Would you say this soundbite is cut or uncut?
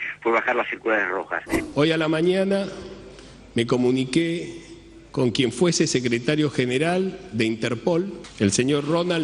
cut